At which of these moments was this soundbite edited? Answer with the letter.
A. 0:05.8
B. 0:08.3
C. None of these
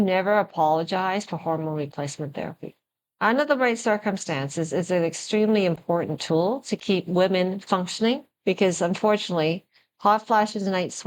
B